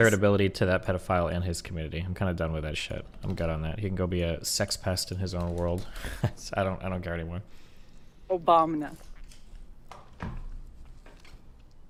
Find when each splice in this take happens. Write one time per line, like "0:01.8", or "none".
none